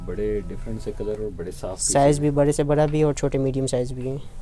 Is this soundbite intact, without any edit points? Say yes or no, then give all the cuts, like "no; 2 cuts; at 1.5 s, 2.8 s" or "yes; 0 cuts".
yes; 0 cuts